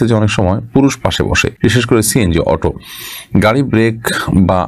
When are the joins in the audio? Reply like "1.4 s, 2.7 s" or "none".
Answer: 1.5 s